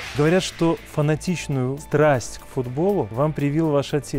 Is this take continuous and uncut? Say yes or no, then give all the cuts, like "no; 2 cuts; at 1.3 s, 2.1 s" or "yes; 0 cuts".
no; 2 cuts; at 1.8 s, 3.1 s